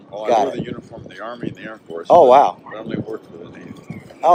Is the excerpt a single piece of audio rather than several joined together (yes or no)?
yes